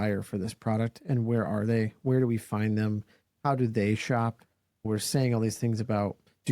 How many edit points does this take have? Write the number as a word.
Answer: one